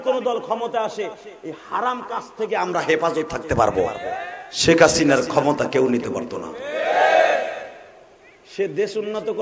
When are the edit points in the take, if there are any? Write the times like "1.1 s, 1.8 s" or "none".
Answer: 4.0 s